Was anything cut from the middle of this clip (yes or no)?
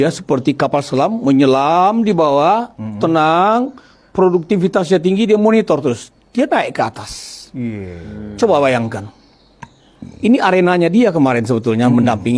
no